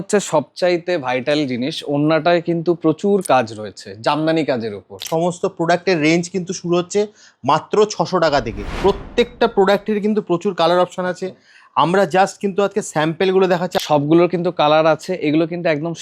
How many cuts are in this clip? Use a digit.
3